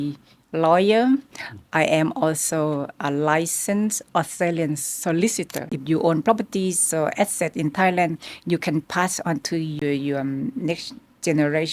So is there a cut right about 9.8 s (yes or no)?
yes